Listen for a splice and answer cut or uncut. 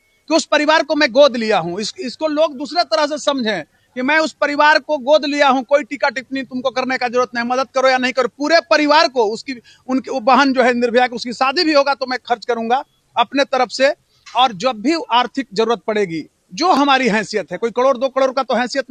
uncut